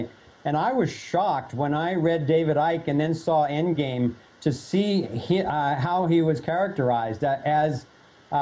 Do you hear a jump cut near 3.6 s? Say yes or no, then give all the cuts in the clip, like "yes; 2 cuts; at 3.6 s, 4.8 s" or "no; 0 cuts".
no; 1 cut; at 6.7 s